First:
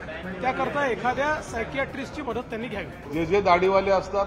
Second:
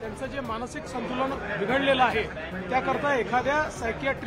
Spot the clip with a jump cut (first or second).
first